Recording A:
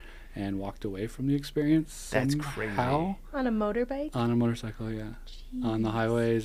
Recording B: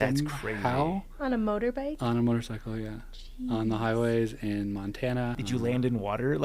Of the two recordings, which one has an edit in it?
B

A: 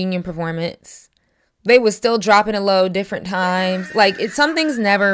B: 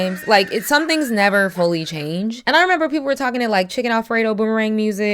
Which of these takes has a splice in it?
B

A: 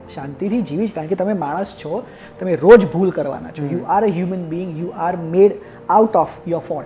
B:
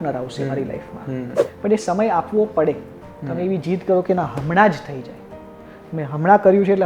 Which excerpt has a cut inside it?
B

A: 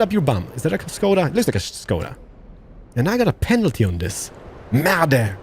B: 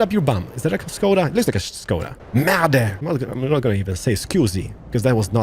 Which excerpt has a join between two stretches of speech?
B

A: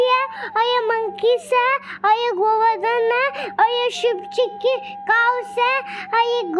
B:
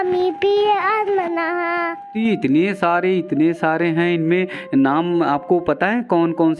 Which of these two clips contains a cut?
B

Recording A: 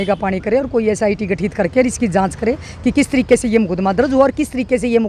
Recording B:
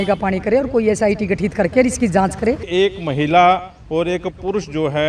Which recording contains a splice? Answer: B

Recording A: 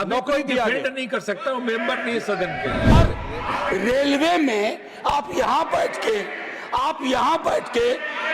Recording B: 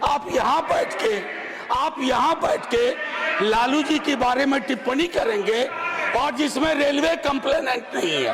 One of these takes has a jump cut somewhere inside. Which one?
A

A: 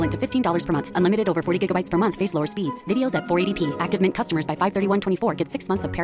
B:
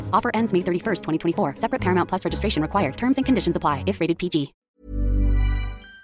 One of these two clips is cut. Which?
B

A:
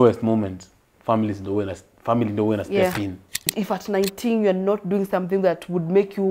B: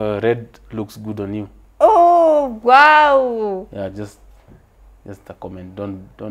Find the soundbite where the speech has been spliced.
A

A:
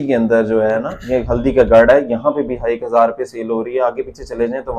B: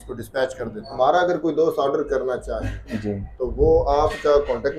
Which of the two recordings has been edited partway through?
B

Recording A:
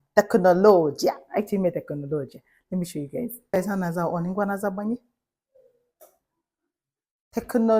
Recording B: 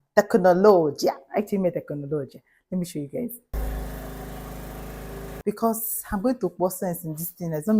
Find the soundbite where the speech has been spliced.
B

